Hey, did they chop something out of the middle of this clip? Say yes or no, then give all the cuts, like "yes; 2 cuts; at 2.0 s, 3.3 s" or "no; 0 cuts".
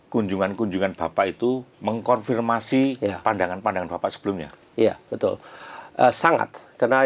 no; 0 cuts